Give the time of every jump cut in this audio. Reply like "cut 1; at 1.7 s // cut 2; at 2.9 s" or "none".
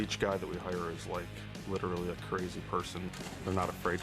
cut 1; at 3.0 s